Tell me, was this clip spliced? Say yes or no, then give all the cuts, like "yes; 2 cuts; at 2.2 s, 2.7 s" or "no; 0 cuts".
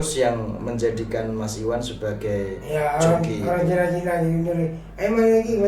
no; 0 cuts